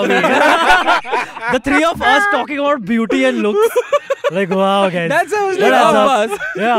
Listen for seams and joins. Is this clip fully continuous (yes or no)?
yes